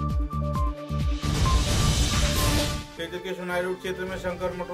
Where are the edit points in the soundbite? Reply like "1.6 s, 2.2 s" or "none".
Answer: none